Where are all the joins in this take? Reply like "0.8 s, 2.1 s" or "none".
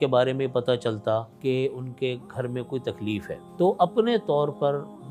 1.3 s, 3.4 s